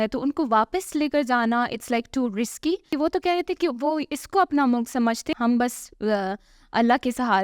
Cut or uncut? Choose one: cut